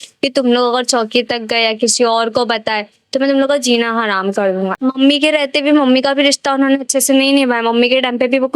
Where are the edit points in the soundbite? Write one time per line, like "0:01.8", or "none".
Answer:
0:04.7